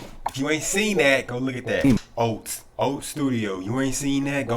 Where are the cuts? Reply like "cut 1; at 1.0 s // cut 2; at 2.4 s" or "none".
cut 1; at 2.0 s